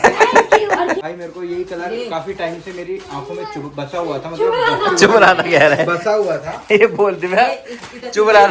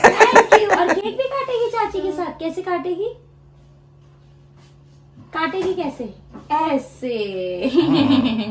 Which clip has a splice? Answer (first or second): first